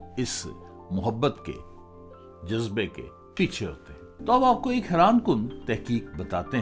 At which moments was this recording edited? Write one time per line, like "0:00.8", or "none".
0:04.2